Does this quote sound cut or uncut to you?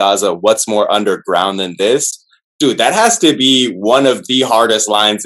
uncut